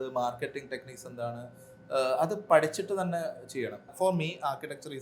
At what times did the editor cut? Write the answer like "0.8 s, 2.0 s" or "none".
3.8 s